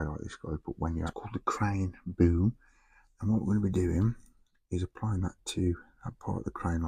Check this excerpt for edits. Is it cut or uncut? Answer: cut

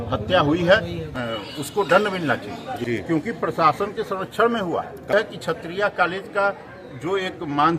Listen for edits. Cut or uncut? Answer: cut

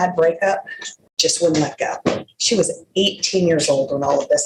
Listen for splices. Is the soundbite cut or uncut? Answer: uncut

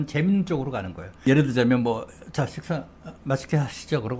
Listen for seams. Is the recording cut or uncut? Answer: cut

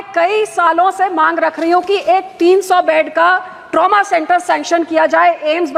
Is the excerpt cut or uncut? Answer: uncut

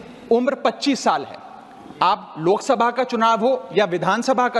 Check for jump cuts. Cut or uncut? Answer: uncut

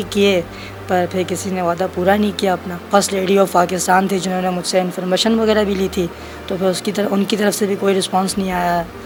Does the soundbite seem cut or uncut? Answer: uncut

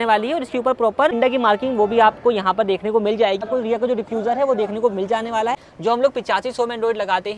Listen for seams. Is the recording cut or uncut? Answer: cut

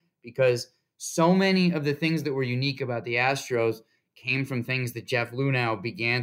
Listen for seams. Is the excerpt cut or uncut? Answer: uncut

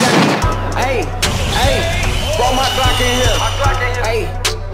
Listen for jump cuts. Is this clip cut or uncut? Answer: uncut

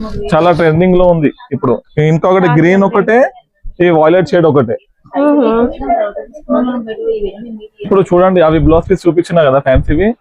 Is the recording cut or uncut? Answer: cut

